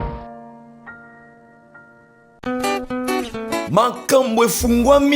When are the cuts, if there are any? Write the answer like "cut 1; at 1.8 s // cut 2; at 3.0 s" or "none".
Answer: cut 1; at 2.4 s